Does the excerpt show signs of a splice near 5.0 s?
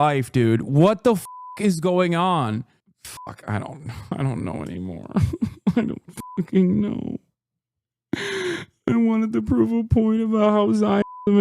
no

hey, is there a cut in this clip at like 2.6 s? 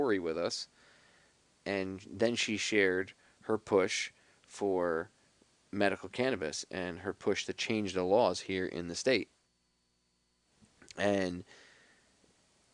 yes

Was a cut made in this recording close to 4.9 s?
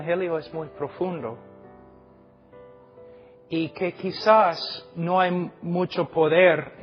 no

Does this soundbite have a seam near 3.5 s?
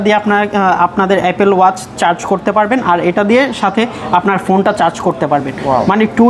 no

